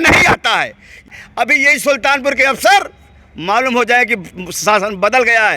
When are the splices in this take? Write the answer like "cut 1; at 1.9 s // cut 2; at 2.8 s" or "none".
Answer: cut 1; at 1.1 s